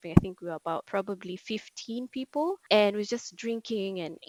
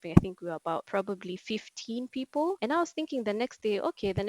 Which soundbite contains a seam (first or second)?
second